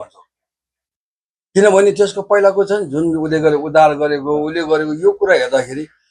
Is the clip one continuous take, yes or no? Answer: yes